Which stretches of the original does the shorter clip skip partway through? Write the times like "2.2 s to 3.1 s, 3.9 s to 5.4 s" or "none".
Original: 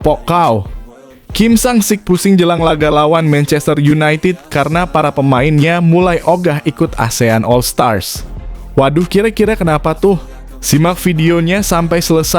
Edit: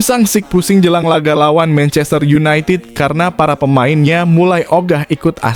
none